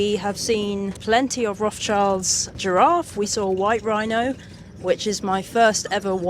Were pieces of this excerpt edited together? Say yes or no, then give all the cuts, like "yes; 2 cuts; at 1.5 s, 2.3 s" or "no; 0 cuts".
yes; 2 cuts; at 1.0 s, 2.6 s